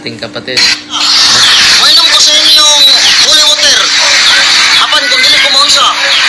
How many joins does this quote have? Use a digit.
1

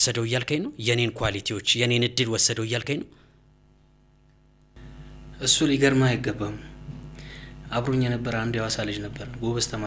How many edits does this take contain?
0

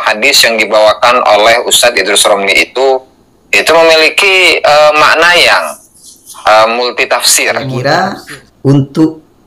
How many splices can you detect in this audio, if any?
1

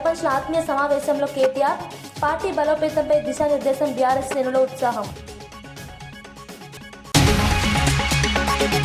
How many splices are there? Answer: 1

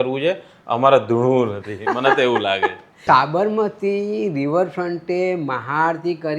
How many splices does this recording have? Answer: 1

